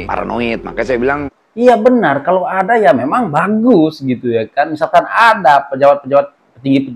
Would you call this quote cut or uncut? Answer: cut